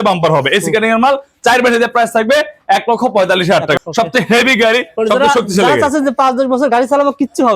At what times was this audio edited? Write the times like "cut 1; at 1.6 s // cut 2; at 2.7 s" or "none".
cut 1; at 3.8 s